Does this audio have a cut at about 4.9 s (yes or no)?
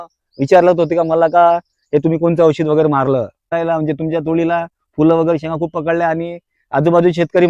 no